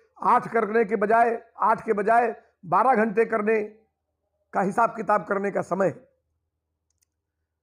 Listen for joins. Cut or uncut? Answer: uncut